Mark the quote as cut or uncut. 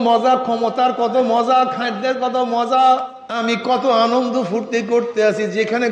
cut